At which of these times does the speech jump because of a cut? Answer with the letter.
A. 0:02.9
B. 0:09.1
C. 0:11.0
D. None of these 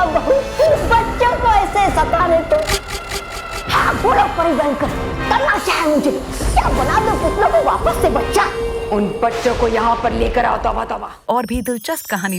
C